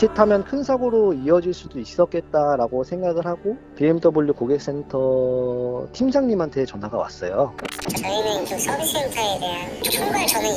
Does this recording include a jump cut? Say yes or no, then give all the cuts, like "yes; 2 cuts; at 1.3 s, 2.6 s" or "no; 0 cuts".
yes; 2 cuts; at 3.6 s, 7.8 s